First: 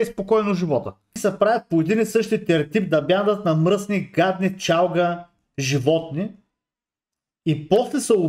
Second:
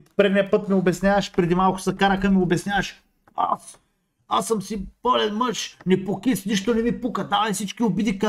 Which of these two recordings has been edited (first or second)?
first